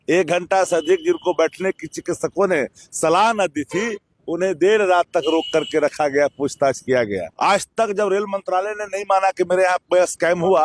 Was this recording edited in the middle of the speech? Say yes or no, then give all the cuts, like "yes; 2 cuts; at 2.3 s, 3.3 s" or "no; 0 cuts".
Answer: yes; 1 cut; at 7.3 s